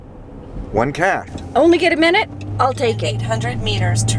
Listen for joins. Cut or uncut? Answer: cut